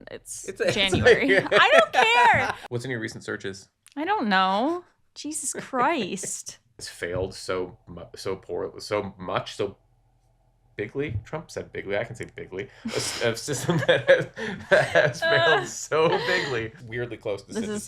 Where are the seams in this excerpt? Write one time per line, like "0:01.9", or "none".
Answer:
0:02.6
0:06.9
0:16.8